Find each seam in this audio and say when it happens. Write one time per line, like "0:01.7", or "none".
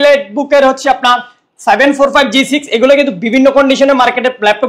none